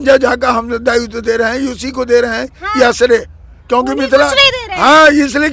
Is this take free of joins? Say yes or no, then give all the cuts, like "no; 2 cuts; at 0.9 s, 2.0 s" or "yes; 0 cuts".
yes; 0 cuts